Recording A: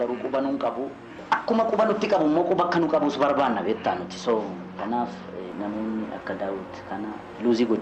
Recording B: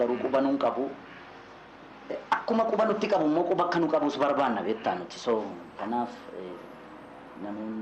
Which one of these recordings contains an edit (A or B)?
A